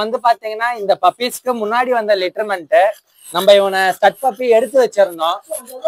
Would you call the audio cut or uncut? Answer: uncut